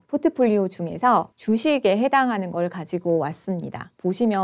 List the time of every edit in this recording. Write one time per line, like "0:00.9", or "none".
0:01.3